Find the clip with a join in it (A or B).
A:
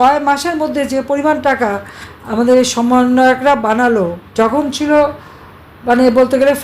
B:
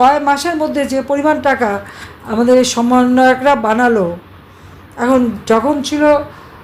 A